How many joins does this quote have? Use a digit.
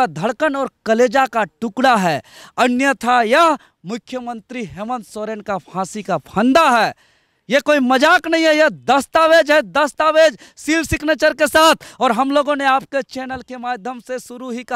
0